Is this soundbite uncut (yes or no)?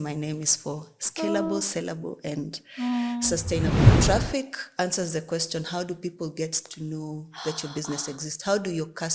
no